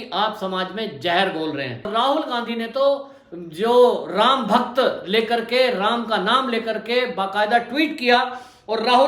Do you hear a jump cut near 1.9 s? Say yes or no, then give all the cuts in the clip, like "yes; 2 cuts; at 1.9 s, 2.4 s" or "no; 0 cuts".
yes; 1 cut; at 1.9 s